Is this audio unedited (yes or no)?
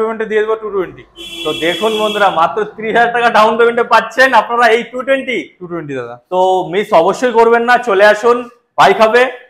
yes